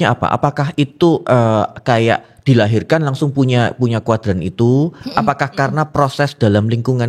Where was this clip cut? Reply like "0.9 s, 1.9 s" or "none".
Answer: none